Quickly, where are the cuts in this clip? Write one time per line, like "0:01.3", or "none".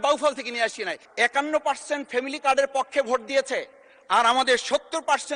0:01.0